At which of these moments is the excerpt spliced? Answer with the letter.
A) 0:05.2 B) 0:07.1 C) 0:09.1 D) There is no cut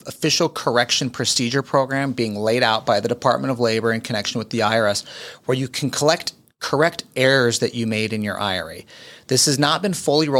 D